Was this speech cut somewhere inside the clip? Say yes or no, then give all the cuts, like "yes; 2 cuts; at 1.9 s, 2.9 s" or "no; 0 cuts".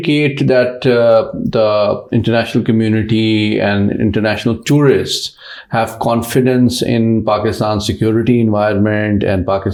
no; 0 cuts